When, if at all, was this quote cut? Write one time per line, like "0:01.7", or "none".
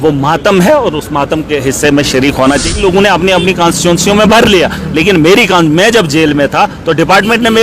0:02.7